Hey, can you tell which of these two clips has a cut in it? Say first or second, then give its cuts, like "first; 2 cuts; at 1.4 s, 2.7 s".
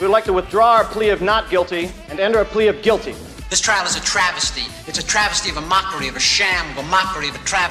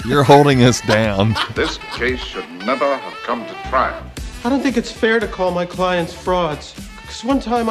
second; 1 cut; at 1.5 s